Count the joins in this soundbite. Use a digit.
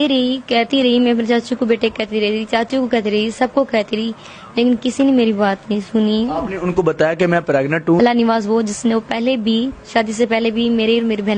1